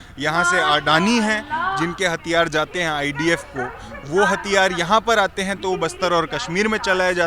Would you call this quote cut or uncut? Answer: uncut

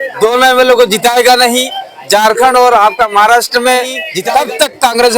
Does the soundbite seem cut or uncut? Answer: cut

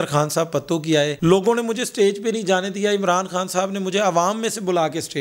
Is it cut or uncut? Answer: uncut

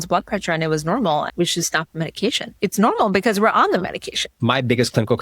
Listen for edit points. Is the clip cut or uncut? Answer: cut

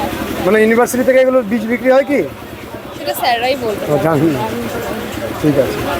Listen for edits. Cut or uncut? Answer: uncut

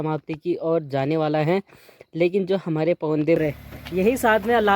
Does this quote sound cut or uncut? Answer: cut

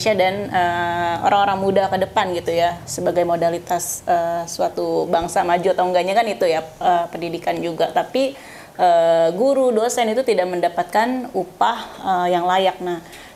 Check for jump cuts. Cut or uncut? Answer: uncut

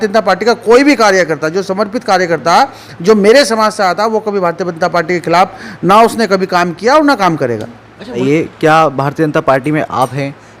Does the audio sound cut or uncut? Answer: cut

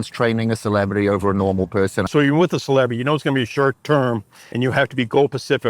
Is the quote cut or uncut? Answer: cut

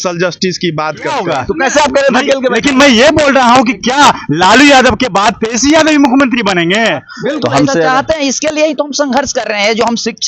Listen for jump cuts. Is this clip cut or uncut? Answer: cut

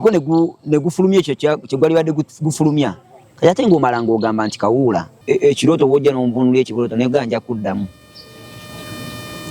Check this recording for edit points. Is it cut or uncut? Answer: cut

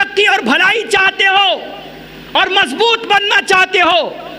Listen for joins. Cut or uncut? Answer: uncut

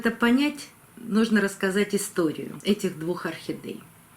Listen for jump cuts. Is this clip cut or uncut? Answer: cut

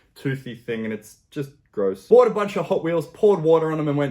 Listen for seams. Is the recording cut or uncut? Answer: cut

